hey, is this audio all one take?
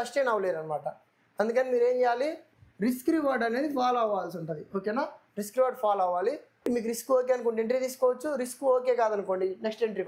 yes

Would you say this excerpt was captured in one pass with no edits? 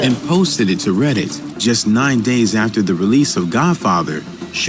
no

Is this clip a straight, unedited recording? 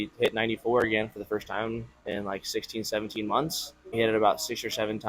no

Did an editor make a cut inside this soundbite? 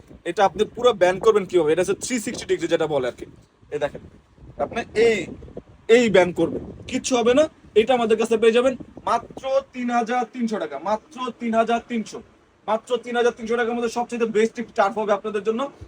no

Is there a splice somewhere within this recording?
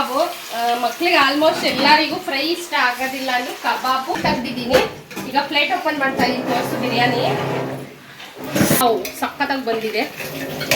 yes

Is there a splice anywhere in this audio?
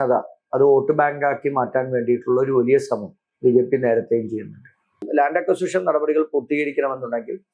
yes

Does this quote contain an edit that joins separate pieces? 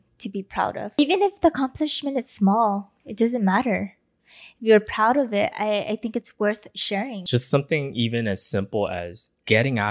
yes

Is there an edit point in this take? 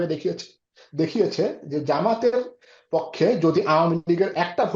no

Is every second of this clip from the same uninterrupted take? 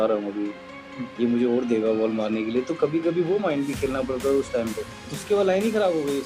no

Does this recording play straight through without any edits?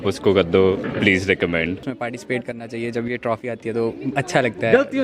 no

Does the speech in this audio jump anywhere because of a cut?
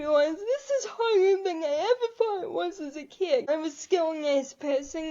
yes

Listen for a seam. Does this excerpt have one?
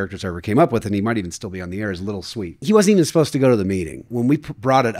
yes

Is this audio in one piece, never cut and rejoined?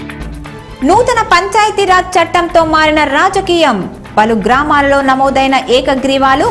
yes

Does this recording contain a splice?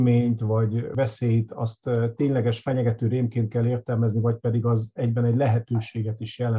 yes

